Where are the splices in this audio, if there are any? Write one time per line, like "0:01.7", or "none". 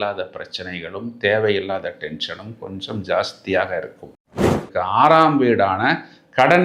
0:04.7

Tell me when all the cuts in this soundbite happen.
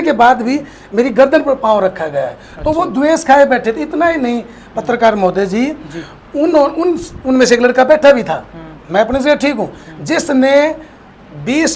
none

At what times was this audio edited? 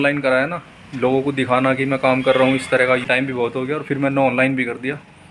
0:03.1

